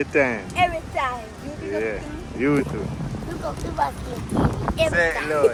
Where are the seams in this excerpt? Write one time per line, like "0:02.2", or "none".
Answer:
none